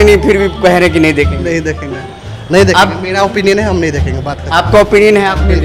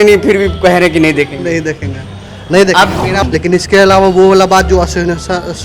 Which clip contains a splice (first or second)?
second